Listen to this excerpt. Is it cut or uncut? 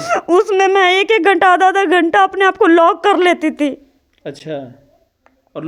uncut